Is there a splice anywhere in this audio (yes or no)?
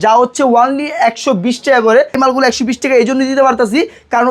yes